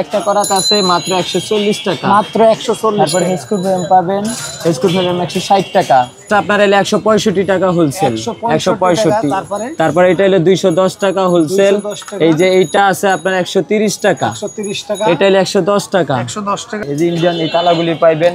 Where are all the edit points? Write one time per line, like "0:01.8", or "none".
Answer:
0:06.2
0:16.8